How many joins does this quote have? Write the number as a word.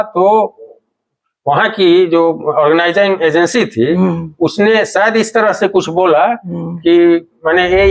zero